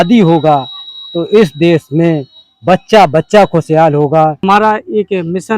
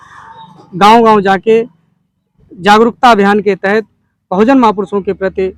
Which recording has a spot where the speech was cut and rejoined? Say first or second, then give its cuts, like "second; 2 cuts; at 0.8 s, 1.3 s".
first; 1 cut; at 4.4 s